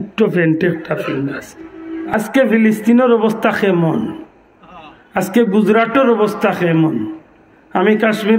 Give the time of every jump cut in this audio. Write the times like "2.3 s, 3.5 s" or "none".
2.1 s